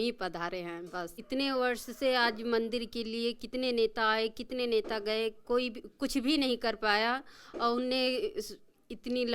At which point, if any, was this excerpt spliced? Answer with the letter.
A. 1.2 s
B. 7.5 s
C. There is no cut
A